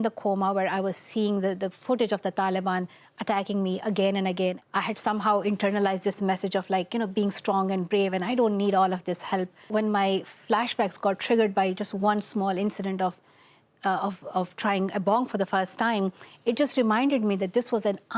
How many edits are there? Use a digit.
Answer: 2